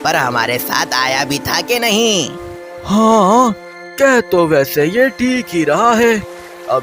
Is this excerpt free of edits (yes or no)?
no